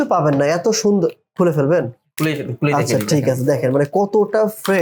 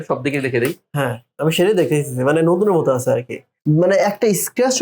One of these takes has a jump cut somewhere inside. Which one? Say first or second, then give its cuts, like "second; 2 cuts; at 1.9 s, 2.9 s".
second; 1 cut; at 3.5 s